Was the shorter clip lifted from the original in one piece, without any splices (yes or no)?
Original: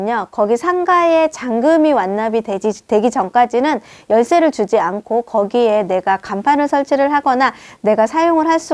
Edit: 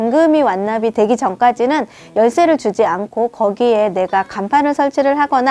no